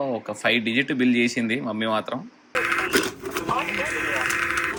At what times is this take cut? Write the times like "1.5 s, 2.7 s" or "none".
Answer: none